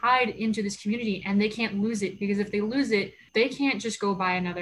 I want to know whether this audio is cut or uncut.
cut